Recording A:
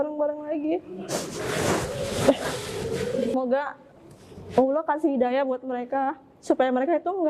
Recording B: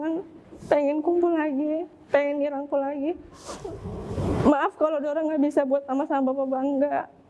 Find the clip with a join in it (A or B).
A